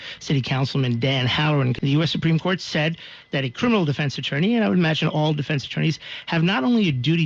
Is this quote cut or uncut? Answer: cut